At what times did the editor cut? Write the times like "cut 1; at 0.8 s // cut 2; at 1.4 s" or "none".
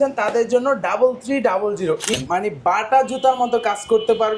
cut 1; at 2.1 s